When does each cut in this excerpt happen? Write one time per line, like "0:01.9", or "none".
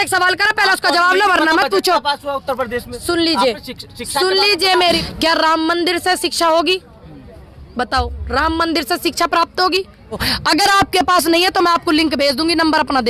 0:04.8
0:10.3